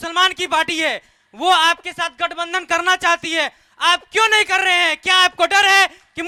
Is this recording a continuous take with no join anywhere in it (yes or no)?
yes